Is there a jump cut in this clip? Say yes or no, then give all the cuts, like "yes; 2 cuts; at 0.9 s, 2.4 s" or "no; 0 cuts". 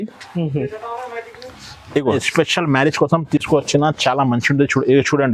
yes; 1 cut; at 2.2 s